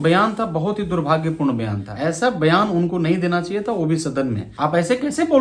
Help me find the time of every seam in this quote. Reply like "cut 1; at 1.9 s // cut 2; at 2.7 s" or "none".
cut 1; at 1.8 s // cut 2; at 4.4 s